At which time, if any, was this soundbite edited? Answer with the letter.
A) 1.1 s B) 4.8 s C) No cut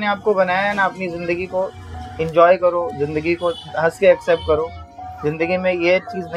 C